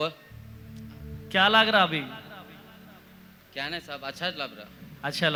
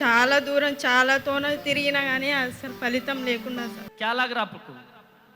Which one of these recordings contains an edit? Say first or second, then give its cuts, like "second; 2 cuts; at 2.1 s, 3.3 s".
second; 1 cut; at 3.8 s